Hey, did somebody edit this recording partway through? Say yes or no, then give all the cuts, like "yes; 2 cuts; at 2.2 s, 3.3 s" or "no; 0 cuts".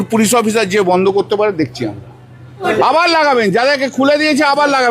yes; 1 cut; at 2.7 s